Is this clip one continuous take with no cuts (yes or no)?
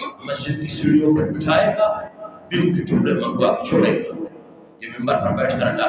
yes